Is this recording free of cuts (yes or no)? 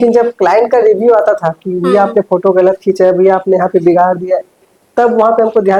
yes